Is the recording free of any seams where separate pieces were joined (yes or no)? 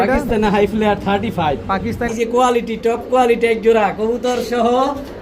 no